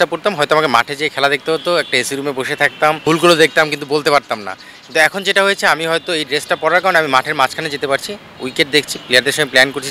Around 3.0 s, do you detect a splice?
yes; 1 cut; at 3.0 s

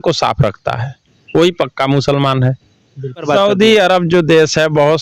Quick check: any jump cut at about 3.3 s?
yes; 1 cut; at 3.3 s

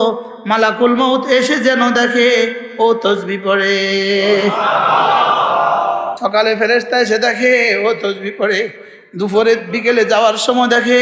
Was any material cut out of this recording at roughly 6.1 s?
yes; 1 cut; at 6.1 s

